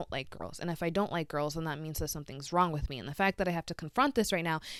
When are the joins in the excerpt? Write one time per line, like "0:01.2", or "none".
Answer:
none